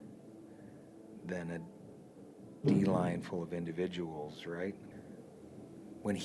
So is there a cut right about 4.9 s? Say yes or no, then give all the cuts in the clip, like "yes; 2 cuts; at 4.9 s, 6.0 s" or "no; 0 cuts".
yes; 1 cut; at 4.9 s